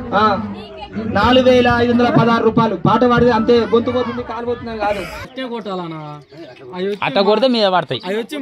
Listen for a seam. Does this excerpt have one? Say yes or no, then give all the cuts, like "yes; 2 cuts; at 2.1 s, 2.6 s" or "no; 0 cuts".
yes; 1 cut; at 5.3 s